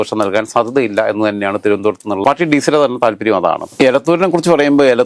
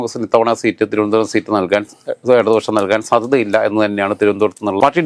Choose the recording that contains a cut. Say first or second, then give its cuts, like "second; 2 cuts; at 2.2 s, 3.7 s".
first; 1 cut; at 3.6 s